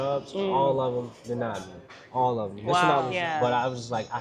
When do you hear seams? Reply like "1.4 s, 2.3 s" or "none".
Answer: 3.1 s